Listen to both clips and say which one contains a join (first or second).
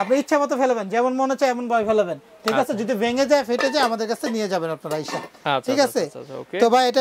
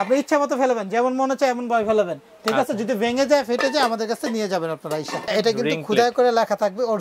second